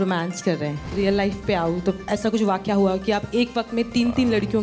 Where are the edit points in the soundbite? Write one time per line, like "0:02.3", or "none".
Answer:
0:00.9
0:02.0